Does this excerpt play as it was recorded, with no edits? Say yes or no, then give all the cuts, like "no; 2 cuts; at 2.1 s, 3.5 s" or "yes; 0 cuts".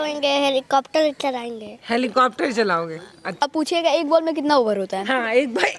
no; 1 cut; at 3.4 s